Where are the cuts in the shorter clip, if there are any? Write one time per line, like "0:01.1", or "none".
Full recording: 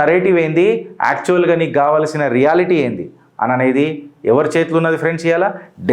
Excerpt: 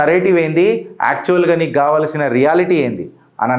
none